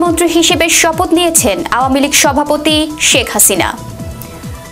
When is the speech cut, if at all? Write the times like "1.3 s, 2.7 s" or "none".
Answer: 3.8 s